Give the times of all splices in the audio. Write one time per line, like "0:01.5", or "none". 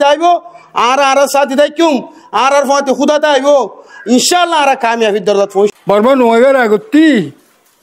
0:05.7

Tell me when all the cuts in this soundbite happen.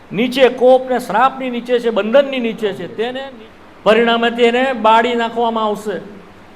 0:03.2

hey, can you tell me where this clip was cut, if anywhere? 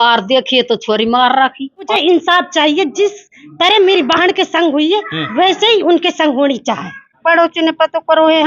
0:01.9
0:07.2

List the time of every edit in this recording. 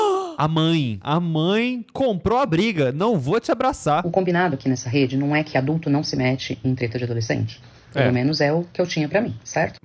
0:00.9
0:04.1

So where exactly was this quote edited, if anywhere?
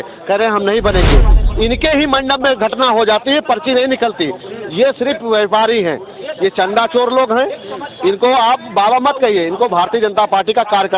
0:01.3

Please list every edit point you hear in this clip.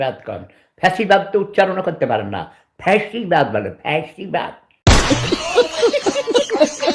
0:05.1

